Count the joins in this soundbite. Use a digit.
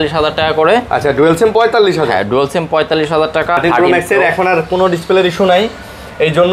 1